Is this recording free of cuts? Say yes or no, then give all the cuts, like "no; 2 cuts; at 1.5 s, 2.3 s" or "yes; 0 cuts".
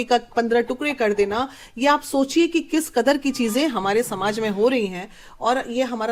yes; 0 cuts